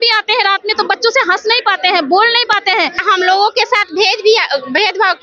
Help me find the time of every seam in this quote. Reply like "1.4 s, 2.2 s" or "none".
3.0 s